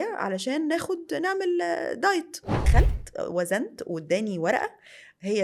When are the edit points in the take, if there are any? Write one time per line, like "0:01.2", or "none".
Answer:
0:02.7